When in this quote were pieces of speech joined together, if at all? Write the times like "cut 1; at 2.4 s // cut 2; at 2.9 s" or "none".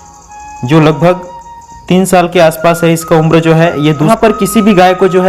cut 1; at 4.1 s

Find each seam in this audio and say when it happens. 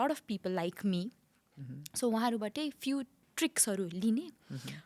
cut 1; at 3.2 s

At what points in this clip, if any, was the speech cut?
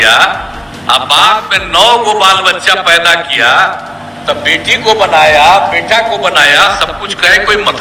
none

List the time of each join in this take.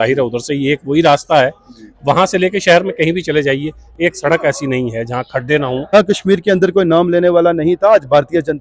cut 1; at 5.9 s

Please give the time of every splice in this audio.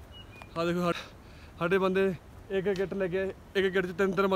cut 1; at 0.9 s

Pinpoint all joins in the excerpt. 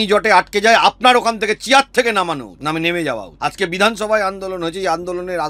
cut 1; at 2.5 s // cut 2; at 3.3 s

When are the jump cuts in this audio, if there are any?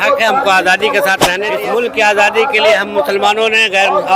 cut 1; at 1.3 s

